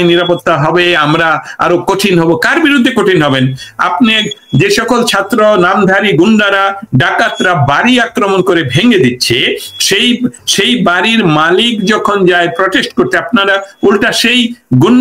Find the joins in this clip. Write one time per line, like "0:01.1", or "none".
none